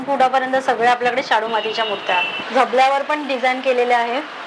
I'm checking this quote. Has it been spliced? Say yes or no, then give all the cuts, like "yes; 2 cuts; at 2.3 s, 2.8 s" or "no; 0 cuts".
yes; 1 cut; at 2.4 s